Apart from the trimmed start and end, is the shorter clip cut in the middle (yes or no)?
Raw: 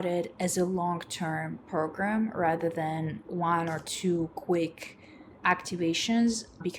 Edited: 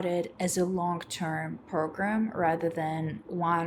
no